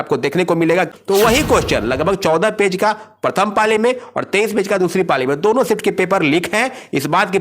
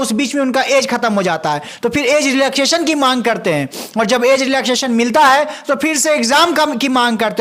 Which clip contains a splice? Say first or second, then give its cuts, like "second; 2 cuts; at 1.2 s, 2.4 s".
first; 1 cut; at 0.9 s